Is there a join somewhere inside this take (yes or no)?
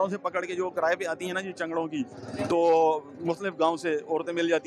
no